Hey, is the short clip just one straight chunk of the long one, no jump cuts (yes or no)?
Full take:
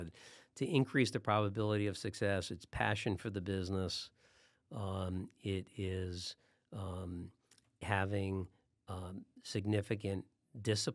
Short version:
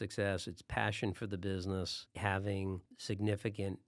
no